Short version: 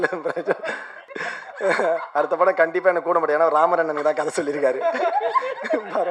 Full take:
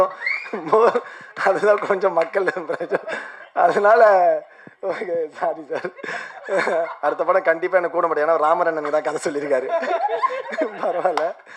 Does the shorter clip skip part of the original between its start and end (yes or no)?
yes